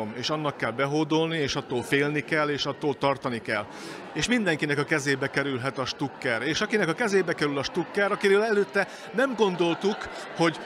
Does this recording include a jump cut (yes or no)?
no